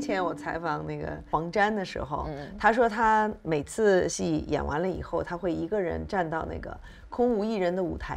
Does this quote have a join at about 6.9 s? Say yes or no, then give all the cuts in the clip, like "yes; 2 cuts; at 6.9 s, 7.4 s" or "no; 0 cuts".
no; 2 cuts; at 1.2 s, 4.1 s